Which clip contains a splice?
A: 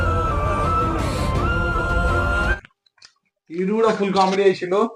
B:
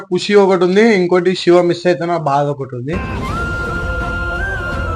A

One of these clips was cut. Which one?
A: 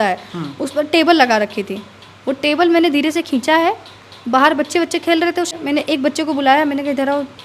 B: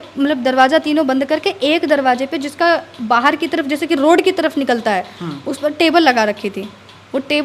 A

